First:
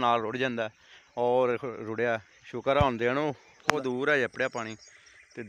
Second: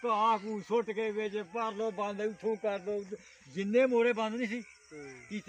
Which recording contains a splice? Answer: first; 1 cut; at 3.7 s

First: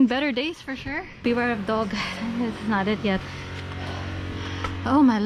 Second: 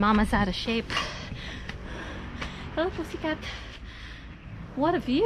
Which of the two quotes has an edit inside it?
first; 1 cut; at 1.1 s

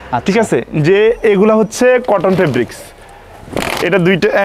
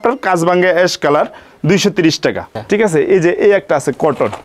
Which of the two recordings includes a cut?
second; 1 cut; at 2.5 s

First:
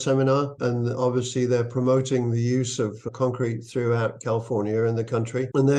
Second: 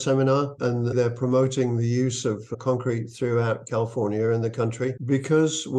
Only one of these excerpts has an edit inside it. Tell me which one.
second; 2 cuts; at 0.9 s, 4.9 s

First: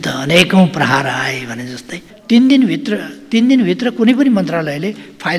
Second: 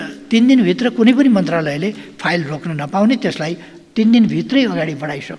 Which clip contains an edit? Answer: first; 1 cut; at 2.1 s

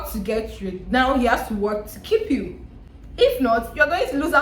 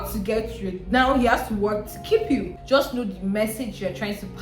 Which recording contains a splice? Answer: second; 1 cut; at 2.6 s

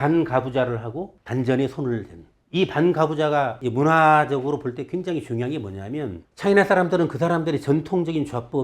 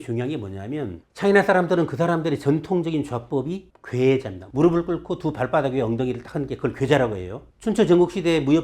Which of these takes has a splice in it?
first; 1 cut; at 3.6 s

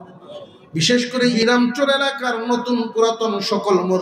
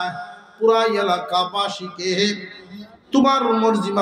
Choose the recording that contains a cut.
first; 1 cut; at 1.3 s

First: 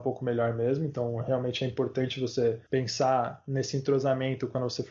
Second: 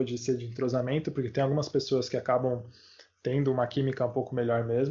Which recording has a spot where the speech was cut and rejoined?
first; 1 cut; at 2.6 s

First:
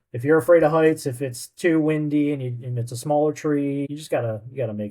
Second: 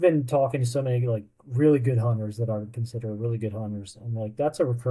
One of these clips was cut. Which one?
first; 1 cut; at 3.9 s

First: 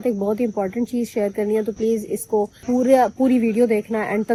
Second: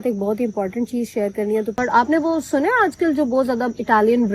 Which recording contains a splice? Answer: second; 1 cut; at 1.8 s

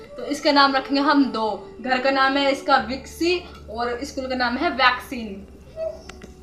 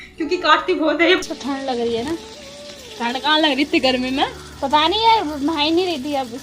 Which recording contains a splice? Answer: second; 1 cut; at 1.2 s

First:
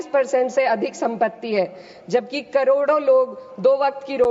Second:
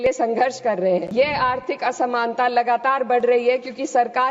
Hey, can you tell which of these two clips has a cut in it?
second; 1 cut; at 1.1 s

